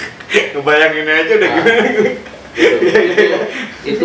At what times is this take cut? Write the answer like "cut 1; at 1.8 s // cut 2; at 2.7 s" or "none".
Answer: none